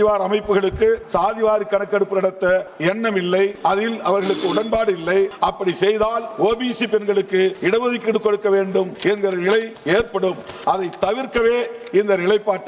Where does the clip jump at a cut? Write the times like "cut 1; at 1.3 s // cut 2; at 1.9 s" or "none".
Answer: cut 1; at 1.0 s // cut 2; at 2.7 s // cut 3; at 3.6 s // cut 4; at 5.3 s // cut 5; at 6.3 s // cut 6; at 7.6 s // cut 7; at 8.9 s // cut 8; at 9.8 s

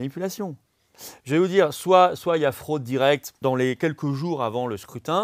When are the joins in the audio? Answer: cut 1; at 3.3 s

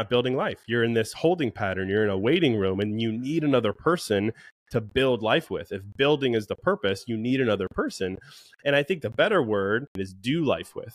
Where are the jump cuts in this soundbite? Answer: cut 1; at 10.0 s

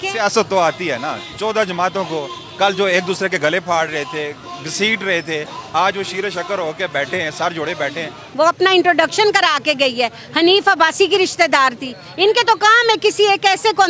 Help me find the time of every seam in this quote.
cut 1; at 8.2 s

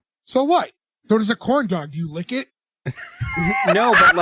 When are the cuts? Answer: none

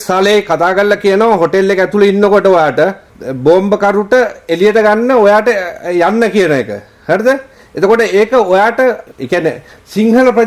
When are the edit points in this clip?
cut 1; at 9.0 s

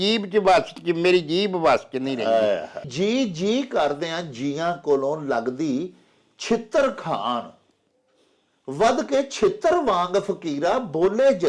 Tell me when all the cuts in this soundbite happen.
cut 1; at 2.9 s

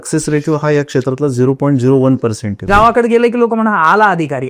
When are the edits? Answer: cut 1; at 2.5 s

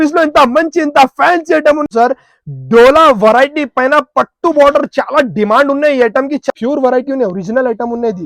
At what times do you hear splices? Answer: cut 1; at 1.9 s // cut 2; at 6.5 s

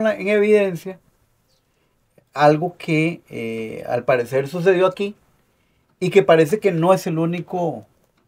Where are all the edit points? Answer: none

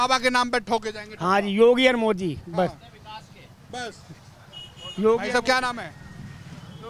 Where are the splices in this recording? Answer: none

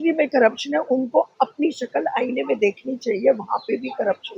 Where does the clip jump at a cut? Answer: none

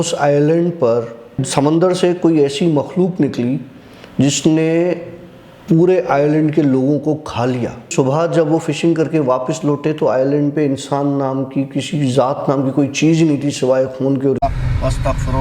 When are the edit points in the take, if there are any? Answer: cut 1; at 1.4 s // cut 2; at 7.8 s // cut 3; at 14.4 s

